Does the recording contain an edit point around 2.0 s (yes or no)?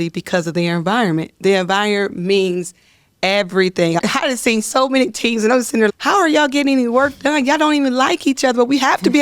no